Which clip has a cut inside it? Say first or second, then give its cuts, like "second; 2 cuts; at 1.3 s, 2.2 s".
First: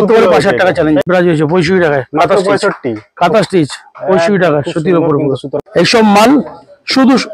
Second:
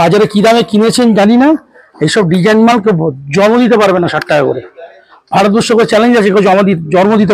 first; 2 cuts; at 1.0 s, 5.5 s